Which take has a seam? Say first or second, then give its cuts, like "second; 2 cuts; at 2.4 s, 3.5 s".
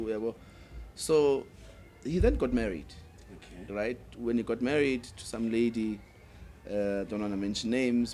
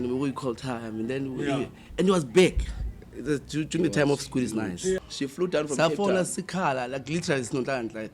second; 1 cut; at 5.0 s